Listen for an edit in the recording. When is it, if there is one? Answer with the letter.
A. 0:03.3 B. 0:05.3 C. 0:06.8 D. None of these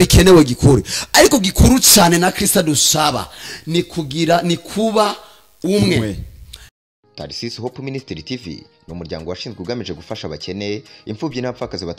C